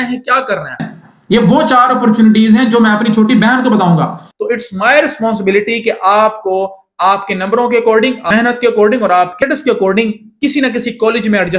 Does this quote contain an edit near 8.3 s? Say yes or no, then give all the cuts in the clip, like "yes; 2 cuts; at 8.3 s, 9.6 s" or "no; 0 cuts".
yes; 4 cuts; at 0.9 s, 4.2 s, 8.3 s, 9.3 s